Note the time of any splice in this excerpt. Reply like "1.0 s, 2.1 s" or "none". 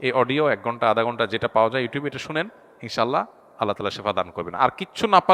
none